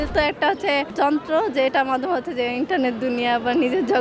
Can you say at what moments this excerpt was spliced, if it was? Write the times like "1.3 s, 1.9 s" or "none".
0.9 s